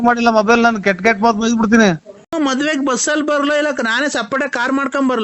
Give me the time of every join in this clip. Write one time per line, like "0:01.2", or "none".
0:02.2